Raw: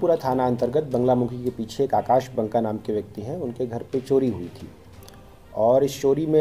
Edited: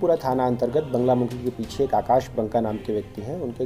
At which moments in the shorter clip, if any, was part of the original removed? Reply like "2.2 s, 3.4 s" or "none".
none